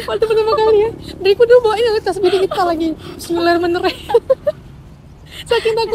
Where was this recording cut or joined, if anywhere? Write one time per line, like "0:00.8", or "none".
none